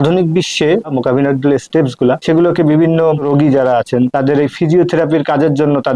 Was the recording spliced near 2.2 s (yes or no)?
yes